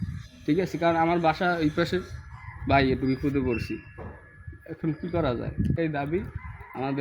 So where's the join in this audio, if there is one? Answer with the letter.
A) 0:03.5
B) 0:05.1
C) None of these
C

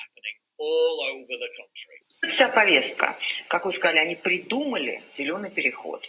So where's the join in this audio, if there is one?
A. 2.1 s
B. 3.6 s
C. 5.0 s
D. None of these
A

